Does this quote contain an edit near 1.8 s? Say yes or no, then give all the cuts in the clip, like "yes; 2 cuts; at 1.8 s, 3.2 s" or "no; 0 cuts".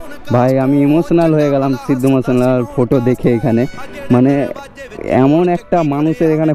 no; 0 cuts